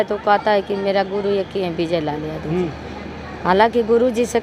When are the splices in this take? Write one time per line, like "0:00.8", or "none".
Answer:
none